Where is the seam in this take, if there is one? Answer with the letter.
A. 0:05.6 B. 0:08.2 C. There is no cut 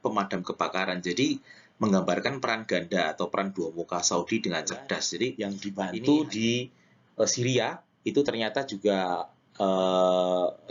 A